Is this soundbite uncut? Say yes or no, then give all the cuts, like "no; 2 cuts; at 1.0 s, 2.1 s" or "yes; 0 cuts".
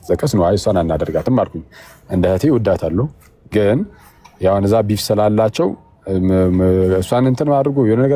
yes; 0 cuts